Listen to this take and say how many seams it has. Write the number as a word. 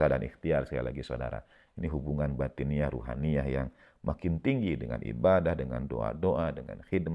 zero